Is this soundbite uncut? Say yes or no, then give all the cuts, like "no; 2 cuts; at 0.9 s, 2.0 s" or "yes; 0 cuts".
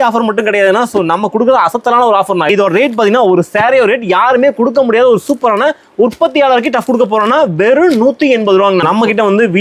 no; 2 cuts; at 2.5 s, 8.8 s